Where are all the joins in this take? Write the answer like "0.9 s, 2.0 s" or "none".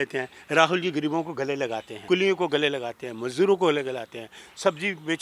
1.9 s